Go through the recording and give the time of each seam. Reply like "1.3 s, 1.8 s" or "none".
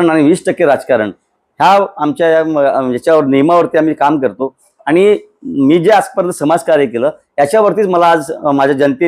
none